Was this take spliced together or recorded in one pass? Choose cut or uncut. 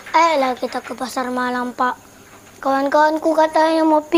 uncut